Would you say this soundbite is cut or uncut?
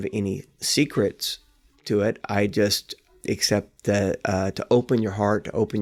uncut